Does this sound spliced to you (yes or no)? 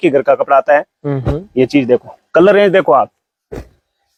no